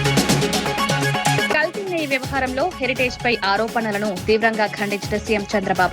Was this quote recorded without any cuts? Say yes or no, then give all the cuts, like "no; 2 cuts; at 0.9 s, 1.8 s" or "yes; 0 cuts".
no; 1 cut; at 1.5 s